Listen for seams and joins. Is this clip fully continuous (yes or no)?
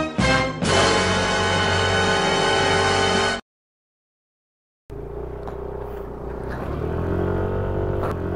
yes